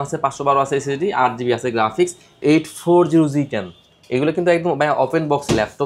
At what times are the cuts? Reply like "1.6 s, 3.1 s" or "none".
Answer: 2.4 s